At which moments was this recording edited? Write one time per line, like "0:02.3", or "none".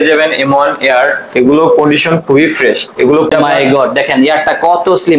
0:03.3